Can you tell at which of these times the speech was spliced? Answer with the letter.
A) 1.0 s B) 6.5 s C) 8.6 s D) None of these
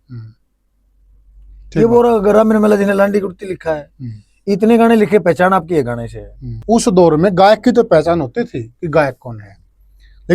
B